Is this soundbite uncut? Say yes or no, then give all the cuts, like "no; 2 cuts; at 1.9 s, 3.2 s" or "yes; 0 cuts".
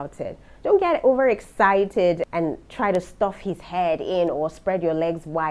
yes; 0 cuts